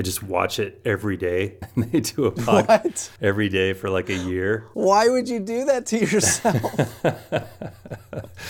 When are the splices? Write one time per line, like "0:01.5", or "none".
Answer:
0:01.6
0:03.1
0:04.7